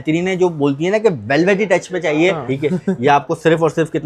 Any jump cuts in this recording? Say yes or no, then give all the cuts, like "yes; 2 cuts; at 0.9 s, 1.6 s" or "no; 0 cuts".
yes; 1 cut; at 2.4 s